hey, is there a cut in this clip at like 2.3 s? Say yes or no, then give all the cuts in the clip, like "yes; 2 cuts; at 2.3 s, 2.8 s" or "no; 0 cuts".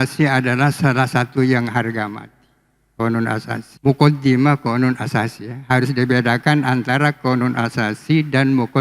no; 1 cut; at 3.7 s